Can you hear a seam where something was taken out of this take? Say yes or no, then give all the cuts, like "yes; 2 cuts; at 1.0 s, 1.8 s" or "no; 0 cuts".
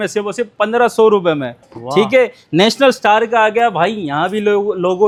no; 0 cuts